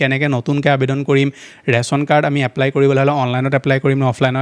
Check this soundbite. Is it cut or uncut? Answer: uncut